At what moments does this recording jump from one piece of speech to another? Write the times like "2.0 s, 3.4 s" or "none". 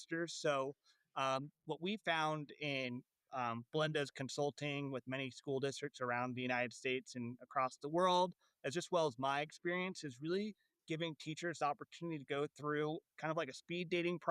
13.1 s